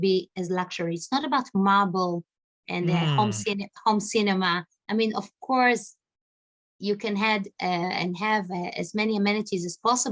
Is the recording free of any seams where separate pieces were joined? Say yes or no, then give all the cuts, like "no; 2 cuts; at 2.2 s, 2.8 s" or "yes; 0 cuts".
yes; 0 cuts